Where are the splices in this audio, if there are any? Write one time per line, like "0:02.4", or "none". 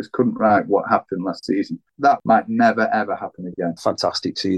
0:02.0
0:03.8